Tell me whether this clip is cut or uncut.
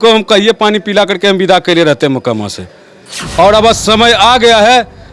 uncut